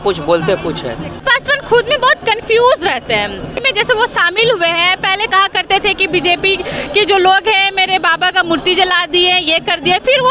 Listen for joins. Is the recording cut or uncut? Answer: cut